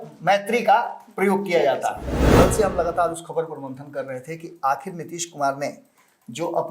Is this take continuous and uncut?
no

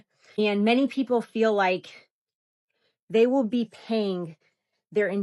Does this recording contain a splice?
no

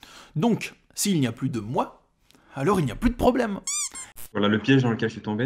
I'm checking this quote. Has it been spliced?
yes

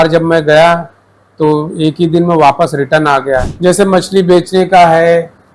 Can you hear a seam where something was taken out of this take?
yes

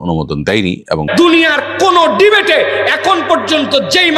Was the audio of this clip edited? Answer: yes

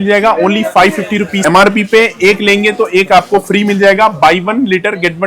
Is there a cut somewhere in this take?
yes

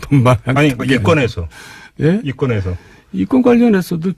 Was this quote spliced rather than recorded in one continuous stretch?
no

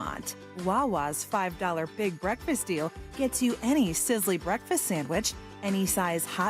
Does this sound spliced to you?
no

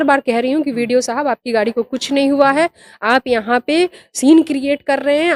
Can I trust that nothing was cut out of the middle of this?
yes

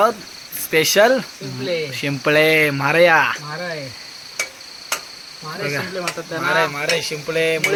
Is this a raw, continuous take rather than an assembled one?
yes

